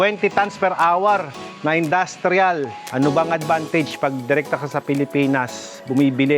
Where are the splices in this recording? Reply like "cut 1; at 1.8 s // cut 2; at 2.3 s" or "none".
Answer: cut 1; at 2.8 s

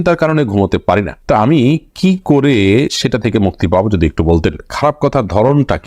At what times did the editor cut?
none

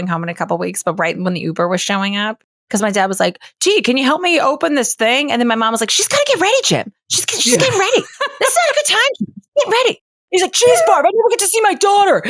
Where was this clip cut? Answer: cut 1; at 2.4 s

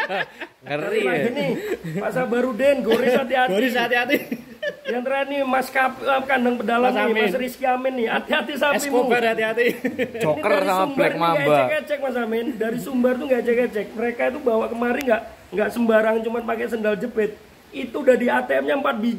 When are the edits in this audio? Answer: none

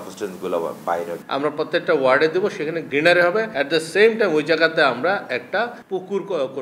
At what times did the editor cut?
cut 1; at 1.2 s // cut 2; at 2.8 s // cut 3; at 3.5 s // cut 4; at 5.8 s

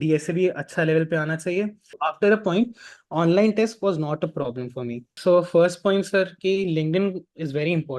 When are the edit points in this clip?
cut 1; at 1.9 s // cut 2; at 5.2 s

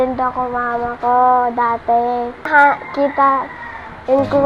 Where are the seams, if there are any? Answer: cut 1; at 2.5 s

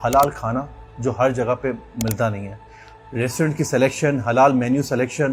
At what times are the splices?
none

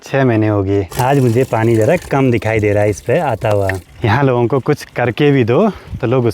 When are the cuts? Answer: cut 1; at 1.0 s // cut 2; at 3.9 s

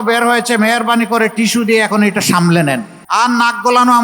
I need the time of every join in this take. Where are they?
cut 1; at 2.9 s

